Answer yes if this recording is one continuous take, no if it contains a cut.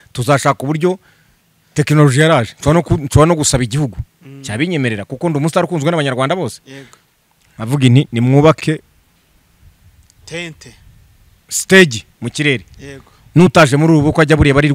yes